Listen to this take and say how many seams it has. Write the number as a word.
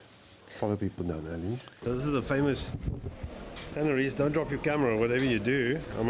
one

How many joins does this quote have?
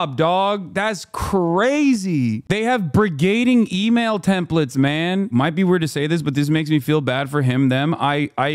one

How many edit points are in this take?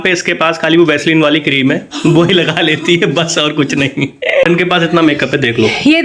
one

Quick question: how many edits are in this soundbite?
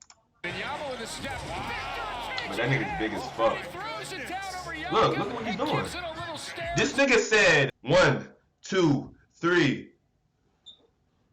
one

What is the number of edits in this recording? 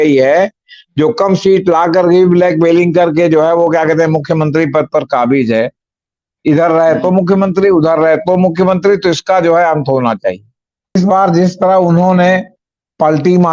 one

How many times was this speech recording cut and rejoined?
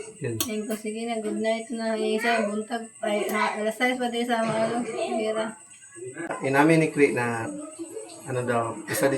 one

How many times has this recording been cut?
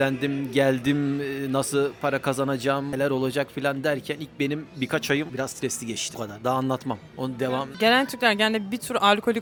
zero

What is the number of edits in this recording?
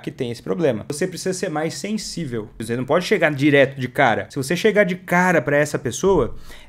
three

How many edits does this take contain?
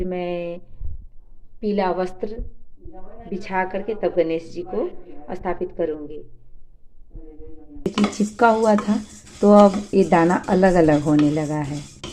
one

